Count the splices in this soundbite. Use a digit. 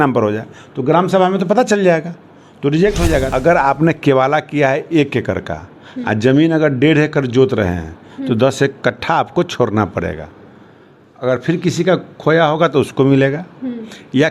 1